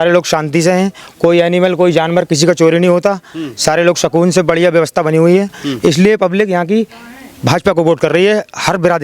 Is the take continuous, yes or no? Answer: yes